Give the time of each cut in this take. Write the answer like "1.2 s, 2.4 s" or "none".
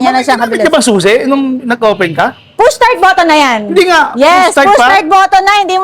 none

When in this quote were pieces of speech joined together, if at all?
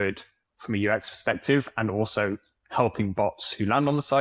none

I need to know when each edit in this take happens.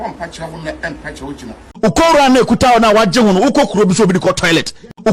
1.6 s

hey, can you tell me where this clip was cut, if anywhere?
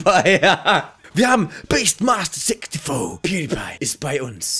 3.2 s

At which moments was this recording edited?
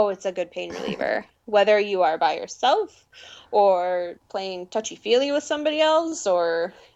4.2 s

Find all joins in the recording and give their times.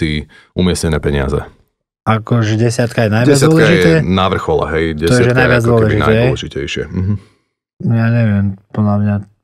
none

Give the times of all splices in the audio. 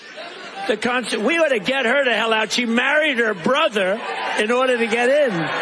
none

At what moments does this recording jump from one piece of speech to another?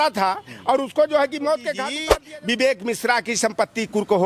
1.9 s

